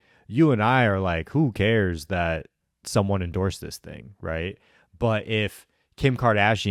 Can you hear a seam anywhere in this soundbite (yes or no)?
no